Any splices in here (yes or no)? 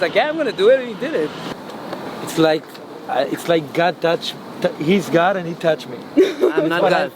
yes